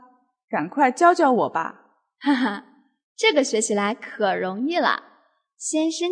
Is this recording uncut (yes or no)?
yes